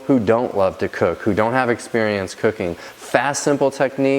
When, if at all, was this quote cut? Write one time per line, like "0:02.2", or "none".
none